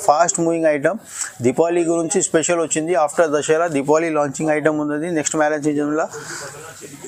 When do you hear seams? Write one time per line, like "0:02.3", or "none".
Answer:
none